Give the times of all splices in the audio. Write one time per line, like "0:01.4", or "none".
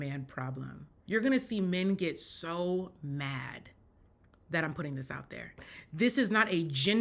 0:00.9
0:05.6

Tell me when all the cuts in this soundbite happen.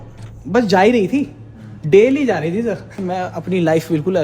0:02.9

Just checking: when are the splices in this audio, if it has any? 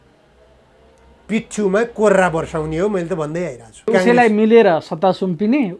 0:03.9

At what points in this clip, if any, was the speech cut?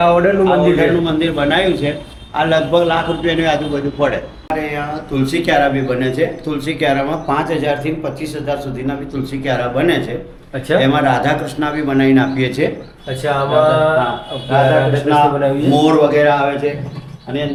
none

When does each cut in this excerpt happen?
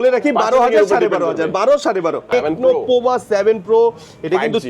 0:02.2

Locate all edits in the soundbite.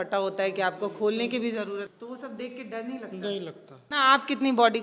0:01.9
0:03.7

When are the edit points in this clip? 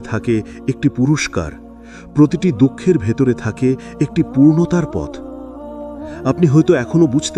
0:05.0
0:06.2

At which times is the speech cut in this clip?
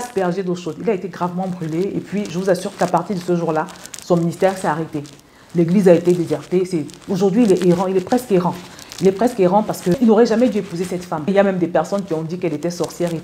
0:10.0

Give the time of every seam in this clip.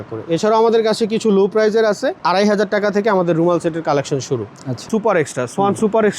0:02.2
0:04.8

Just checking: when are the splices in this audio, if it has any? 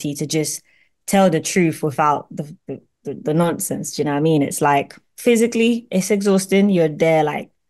0:05.0

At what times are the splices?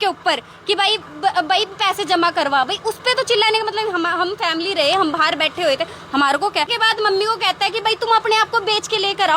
0:06.7

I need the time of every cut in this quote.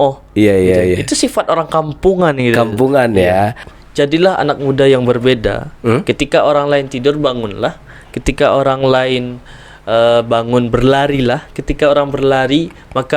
0:03.7

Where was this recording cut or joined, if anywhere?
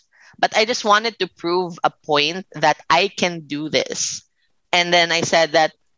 0:04.6

